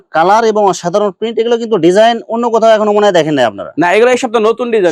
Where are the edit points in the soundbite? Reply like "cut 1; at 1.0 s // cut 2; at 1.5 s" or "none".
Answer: none